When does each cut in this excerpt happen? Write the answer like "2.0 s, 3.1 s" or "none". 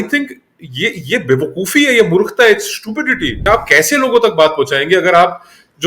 3.4 s